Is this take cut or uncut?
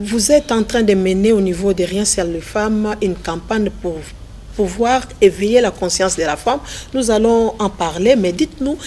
uncut